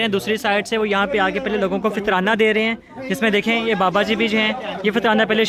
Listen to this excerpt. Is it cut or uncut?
uncut